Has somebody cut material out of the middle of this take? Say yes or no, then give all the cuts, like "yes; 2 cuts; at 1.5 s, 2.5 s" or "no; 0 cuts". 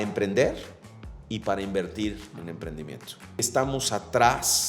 yes; 1 cut; at 3.4 s